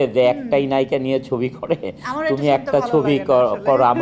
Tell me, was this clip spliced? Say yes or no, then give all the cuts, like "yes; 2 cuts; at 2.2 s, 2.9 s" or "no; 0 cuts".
no; 0 cuts